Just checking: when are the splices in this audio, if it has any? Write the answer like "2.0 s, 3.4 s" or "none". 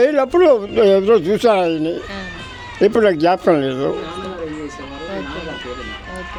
none